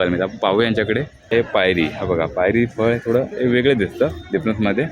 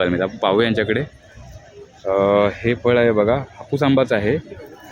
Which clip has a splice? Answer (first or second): first